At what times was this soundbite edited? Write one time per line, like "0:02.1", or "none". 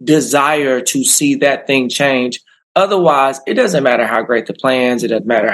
none